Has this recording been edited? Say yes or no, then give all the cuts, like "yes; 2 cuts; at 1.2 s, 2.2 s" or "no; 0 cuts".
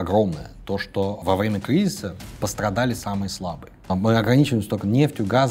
yes; 2 cuts; at 1.2 s, 3.9 s